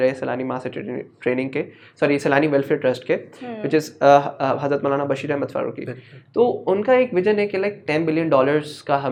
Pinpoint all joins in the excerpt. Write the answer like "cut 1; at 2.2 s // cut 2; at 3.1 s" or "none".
none